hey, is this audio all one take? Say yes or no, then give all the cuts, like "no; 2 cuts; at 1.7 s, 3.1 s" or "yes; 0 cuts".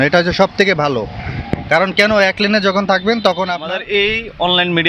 no; 1 cut; at 3.7 s